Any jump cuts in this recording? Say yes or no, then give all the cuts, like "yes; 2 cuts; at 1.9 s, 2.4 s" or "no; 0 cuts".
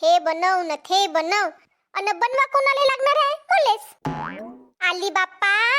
yes; 1 cut; at 3.9 s